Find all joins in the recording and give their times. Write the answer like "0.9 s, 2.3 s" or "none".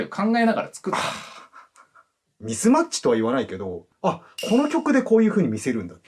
2.4 s